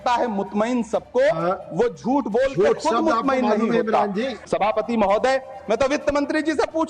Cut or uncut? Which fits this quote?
cut